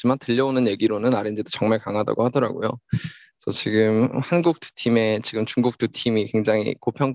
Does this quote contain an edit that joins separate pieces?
no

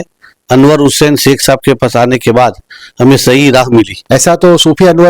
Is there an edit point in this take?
yes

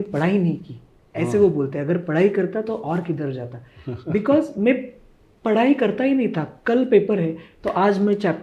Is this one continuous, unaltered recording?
yes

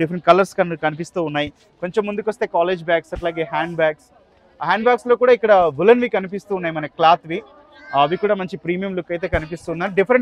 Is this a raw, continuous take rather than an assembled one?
yes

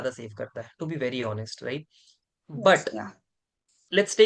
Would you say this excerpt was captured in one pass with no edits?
yes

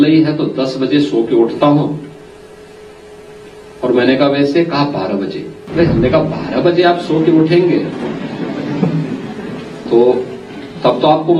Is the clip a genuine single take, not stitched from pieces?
no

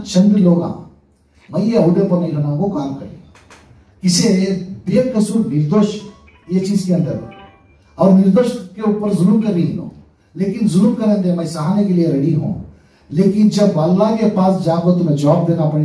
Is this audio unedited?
yes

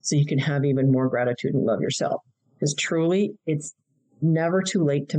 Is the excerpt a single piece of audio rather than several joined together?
yes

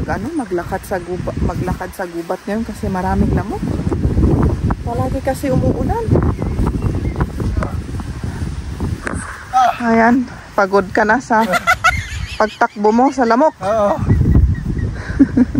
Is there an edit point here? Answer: no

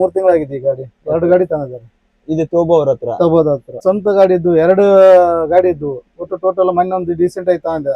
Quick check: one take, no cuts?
no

